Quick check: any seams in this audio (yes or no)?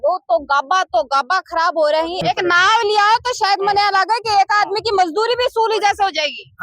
yes